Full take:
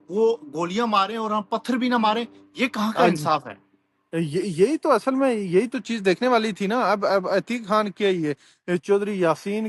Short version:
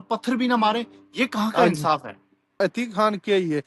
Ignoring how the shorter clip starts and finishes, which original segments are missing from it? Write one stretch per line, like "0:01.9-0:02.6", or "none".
0:04.0-0:07.3

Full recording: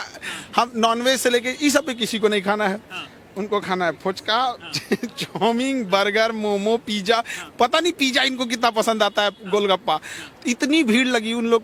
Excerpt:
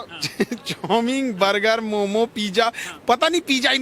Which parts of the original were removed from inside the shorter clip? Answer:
none

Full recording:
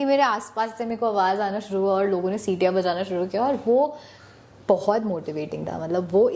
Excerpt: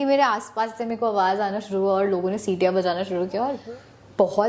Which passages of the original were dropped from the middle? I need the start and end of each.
0:03.6-0:04.1

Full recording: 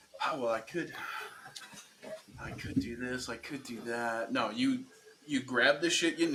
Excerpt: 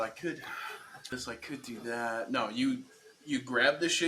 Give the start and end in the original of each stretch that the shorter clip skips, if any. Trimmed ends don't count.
0:01.6-0:03.1

